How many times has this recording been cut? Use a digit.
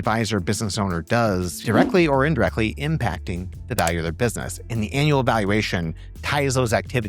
1